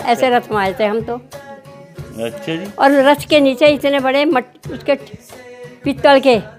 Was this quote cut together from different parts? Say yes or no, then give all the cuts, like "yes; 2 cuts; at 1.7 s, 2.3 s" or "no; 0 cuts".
no; 0 cuts